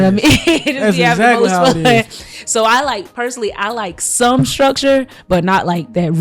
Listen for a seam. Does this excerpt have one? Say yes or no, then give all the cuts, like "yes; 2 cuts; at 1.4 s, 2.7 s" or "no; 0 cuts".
no; 0 cuts